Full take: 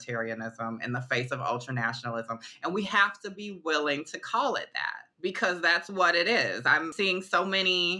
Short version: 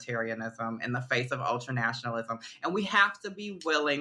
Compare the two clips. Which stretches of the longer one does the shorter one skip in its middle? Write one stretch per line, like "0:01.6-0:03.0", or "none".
none